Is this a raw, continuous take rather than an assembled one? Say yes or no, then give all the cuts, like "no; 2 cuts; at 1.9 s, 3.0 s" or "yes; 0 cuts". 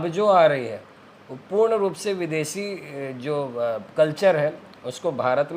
yes; 0 cuts